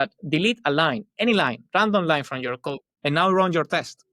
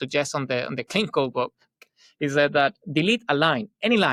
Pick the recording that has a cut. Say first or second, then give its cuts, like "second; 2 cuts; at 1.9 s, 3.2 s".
first; 1 cut; at 2.9 s